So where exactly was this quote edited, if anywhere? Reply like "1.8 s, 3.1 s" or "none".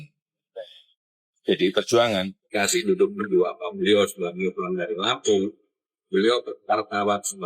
2.4 s